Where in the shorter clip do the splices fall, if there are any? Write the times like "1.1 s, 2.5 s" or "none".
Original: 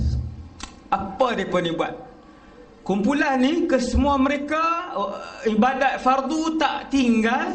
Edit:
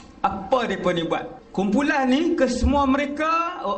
1.4 s

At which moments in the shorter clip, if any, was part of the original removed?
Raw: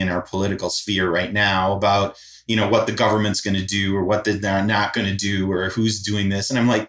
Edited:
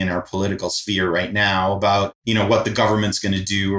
2.2 s

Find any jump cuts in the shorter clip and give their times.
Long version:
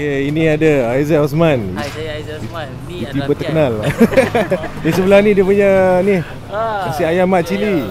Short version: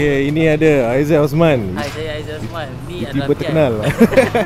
none

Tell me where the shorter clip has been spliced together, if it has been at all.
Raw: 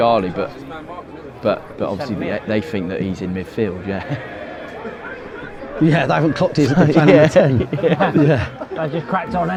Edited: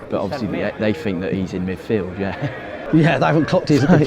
2.8 s

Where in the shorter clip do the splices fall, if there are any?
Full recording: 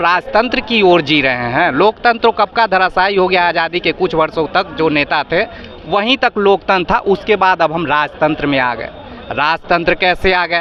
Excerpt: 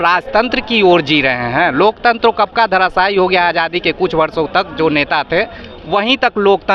none

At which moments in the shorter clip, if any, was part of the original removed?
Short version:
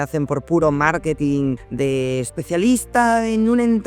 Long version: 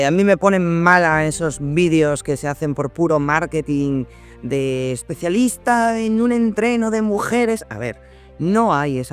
1.6 s

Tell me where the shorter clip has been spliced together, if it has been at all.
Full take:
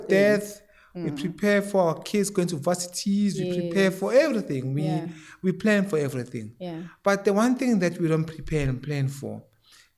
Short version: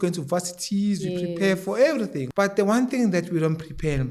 2.2 s

